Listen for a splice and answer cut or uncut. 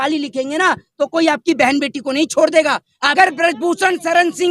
cut